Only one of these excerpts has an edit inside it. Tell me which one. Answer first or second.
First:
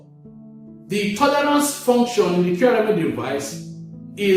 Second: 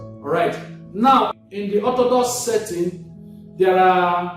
second